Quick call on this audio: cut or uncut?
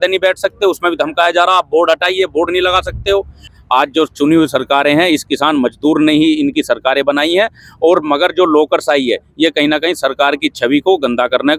cut